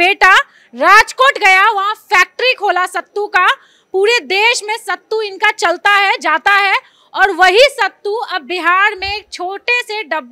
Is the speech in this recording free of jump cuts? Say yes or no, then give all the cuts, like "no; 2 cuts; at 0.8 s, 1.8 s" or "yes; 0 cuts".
yes; 0 cuts